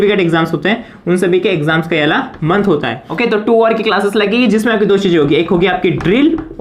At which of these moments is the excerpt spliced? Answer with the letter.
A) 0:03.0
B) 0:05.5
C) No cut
A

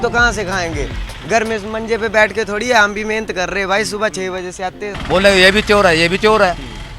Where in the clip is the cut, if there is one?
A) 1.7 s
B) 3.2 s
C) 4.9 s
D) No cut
C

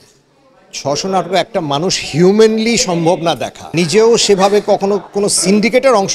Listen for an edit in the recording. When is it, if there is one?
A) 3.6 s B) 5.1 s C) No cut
A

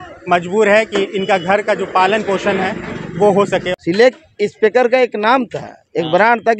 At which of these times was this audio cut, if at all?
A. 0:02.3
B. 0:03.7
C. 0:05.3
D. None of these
B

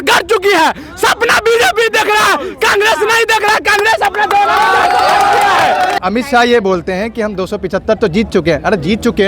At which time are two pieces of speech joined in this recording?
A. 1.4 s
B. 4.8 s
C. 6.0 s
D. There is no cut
C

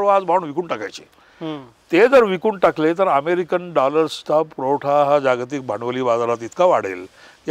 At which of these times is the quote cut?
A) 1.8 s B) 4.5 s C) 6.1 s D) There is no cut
D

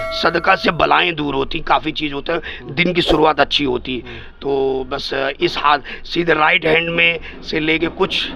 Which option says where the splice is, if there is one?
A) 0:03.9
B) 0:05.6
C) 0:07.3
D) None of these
D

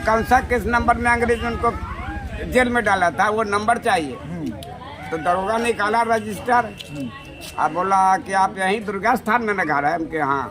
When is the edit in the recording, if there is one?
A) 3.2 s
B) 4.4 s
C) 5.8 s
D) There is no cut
D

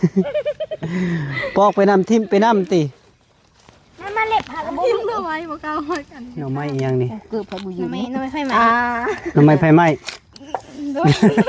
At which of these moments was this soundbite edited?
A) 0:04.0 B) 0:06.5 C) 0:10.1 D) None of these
B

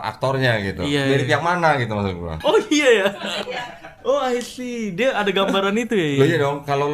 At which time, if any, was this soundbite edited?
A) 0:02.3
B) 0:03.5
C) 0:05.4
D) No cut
A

